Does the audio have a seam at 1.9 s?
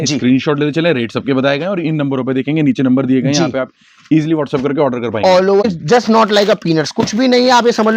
no; 1 cut; at 5.6 s

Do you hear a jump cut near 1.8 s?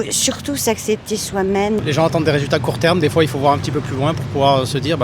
yes; 1 cut; at 1.8 s

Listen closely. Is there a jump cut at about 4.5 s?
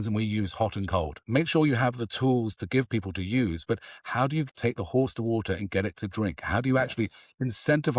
yes; 2 cuts; at 1.2 s, 4.5 s

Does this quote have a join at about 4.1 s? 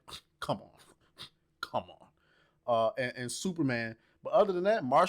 no; 0 cuts

